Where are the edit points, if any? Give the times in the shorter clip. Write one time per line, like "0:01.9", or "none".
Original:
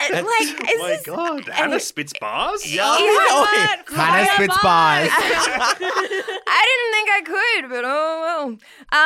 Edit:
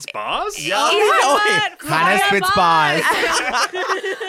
none